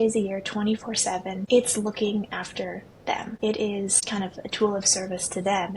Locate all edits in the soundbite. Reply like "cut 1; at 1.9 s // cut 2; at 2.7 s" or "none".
cut 1; at 1.4 s // cut 2; at 3.3 s // cut 3; at 4.0 s